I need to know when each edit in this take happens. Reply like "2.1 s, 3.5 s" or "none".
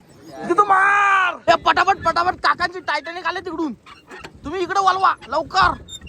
1.4 s